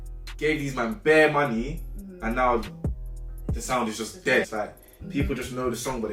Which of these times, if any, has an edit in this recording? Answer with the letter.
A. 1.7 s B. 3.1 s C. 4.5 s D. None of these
C